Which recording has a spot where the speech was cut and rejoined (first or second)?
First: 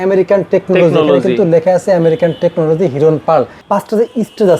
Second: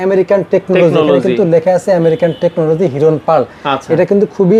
first